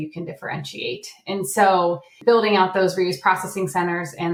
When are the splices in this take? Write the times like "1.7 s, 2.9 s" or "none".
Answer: none